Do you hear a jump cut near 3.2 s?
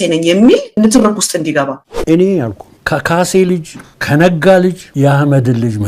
no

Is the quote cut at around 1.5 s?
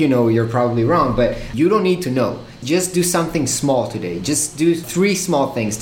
yes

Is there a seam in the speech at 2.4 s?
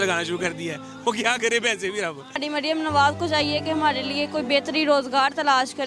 yes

